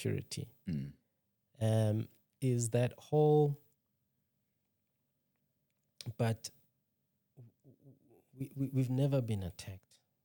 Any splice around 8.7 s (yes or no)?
no